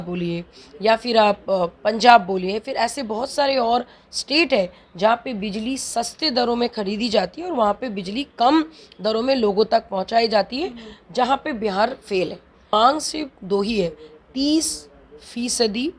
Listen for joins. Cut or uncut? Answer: cut